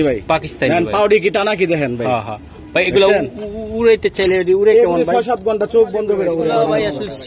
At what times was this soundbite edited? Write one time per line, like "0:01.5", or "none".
0:06.4